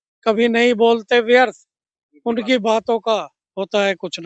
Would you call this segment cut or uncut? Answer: uncut